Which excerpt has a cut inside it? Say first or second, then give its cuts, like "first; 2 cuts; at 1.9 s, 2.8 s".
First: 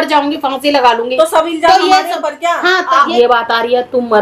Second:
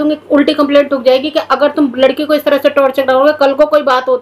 first; 1 cut; at 3.1 s